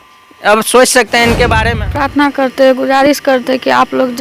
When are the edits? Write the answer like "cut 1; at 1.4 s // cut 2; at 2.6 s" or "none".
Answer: cut 1; at 1.8 s